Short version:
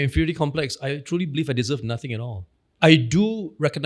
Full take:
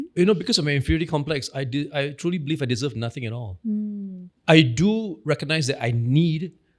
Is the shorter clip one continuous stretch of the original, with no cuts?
no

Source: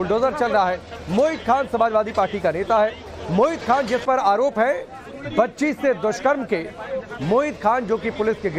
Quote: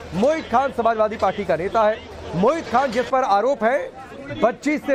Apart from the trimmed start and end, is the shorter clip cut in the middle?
no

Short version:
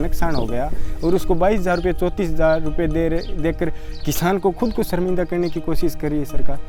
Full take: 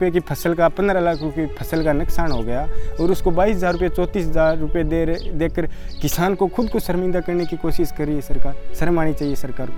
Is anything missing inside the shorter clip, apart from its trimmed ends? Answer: no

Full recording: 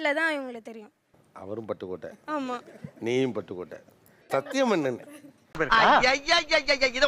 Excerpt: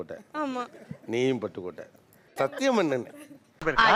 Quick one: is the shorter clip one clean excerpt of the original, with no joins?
yes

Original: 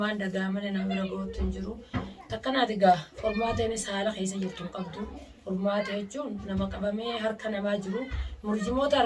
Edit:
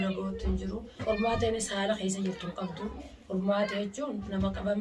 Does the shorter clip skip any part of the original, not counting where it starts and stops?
yes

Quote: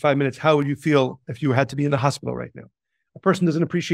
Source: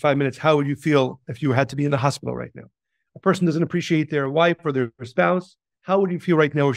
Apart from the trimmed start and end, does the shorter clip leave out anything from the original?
no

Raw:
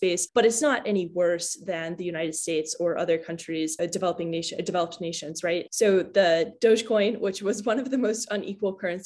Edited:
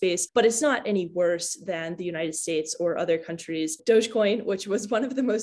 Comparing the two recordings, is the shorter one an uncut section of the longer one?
no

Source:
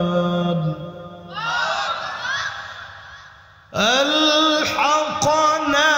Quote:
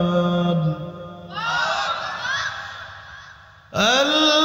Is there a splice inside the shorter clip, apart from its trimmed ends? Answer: no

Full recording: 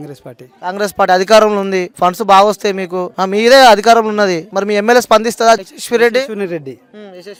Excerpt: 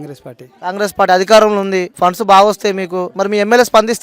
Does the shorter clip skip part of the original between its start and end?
yes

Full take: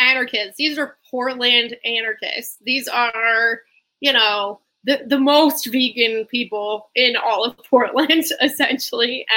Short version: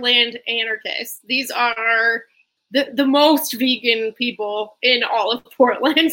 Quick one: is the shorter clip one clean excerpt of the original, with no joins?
no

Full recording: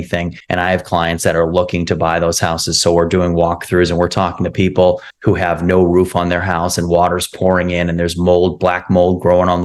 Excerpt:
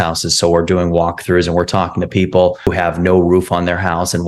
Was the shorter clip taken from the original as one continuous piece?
no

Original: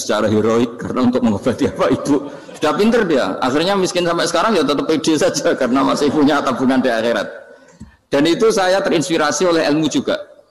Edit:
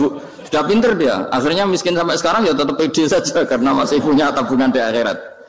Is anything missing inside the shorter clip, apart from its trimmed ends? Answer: no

